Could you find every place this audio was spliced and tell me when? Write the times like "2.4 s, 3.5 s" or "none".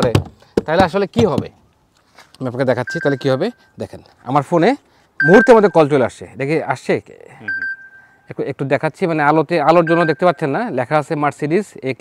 none